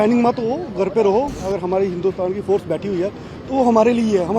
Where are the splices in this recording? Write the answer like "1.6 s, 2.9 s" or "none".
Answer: 1.4 s